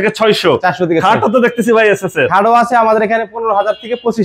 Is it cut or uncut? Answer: uncut